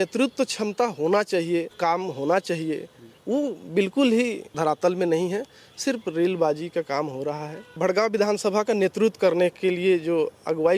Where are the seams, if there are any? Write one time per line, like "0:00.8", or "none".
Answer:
0:01.8
0:04.4
0:07.6